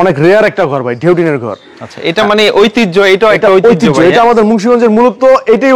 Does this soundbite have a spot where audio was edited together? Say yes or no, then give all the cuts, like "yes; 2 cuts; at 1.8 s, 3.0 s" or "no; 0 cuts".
no; 0 cuts